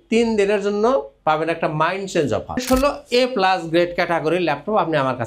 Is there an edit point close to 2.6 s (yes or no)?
yes